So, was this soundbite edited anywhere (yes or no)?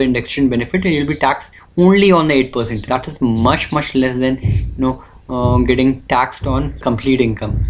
yes